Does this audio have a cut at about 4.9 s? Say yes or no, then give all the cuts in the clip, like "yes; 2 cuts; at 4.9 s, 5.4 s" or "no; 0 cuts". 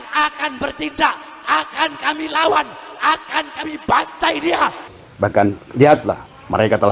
yes; 1 cut; at 4.9 s